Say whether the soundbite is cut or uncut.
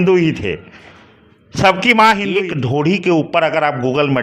cut